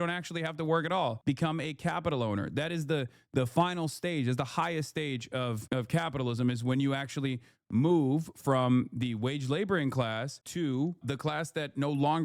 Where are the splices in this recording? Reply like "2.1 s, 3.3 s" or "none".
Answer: 11.0 s